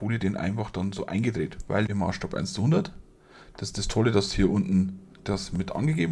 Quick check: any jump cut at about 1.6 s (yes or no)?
yes